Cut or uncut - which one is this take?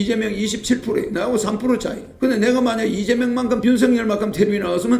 cut